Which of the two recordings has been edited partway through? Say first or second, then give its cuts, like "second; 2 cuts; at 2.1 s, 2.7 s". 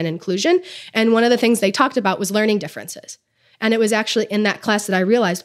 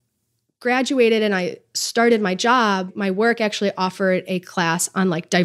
second; 1 cut; at 2.9 s